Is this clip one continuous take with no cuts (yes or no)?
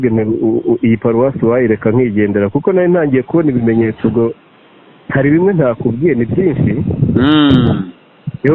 yes